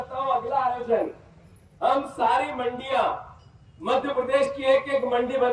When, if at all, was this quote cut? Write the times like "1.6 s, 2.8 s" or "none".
none